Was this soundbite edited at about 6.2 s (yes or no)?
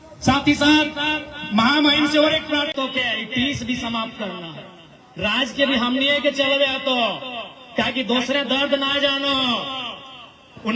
no